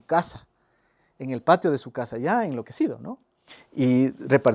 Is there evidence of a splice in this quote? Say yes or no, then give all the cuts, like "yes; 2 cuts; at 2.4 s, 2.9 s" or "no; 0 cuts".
no; 0 cuts